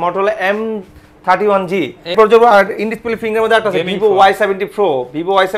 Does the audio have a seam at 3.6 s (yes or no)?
no